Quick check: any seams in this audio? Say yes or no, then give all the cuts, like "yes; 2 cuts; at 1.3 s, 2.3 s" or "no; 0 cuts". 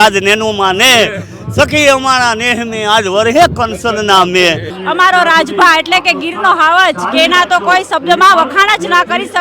yes; 1 cut; at 4.7 s